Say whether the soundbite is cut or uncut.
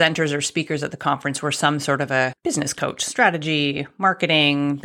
cut